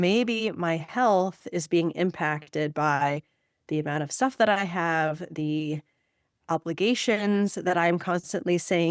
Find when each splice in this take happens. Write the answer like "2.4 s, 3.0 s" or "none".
none